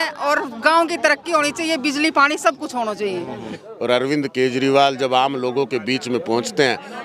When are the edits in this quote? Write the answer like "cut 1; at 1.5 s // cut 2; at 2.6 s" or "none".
cut 1; at 3.6 s